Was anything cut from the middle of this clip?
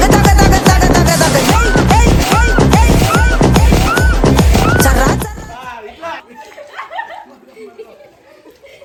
no; 0 cuts

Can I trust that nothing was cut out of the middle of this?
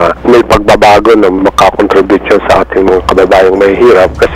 yes; 0 cuts

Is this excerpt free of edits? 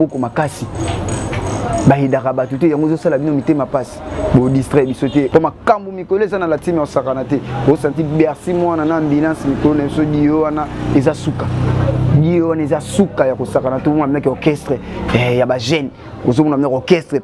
no; 1 cut; at 5.3 s

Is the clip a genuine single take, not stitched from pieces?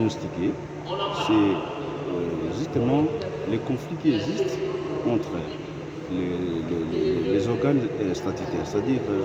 yes; 0 cuts

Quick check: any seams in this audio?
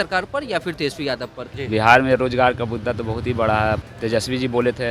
yes; 2 cuts; at 1.5 s, 3.8 s

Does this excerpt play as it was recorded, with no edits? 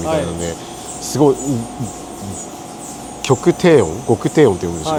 yes; 0 cuts

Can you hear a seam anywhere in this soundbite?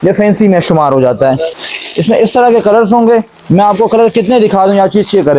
yes; 1 cut; at 1.6 s

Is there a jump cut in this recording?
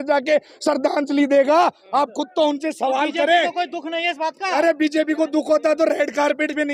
no; 0 cuts

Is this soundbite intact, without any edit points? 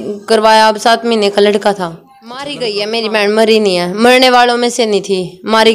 no; 1 cut; at 2.5 s

